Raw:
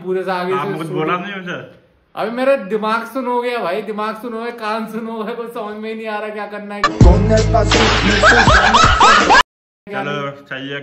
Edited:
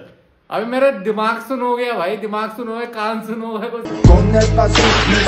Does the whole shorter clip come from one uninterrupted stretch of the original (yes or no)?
no